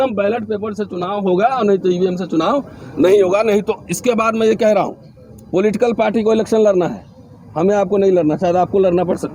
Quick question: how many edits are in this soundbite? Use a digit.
0